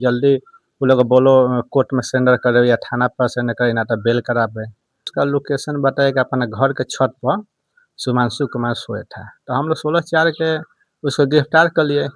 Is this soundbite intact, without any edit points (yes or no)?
no